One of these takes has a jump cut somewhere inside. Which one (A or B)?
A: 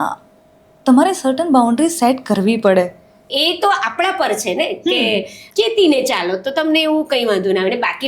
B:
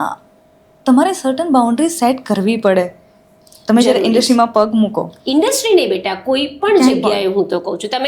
A